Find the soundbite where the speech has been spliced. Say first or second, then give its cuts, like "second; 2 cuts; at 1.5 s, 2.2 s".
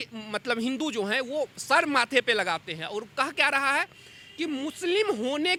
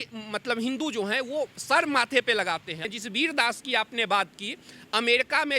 second; 1 cut; at 2.9 s